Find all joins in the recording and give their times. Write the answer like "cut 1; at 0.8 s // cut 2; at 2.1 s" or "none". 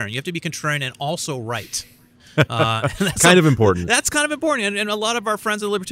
none